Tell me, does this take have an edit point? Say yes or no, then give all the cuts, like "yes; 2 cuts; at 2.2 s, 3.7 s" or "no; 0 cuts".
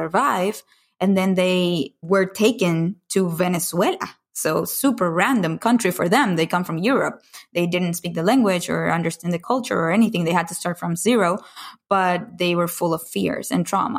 yes; 2 cuts; at 2.0 s, 9.4 s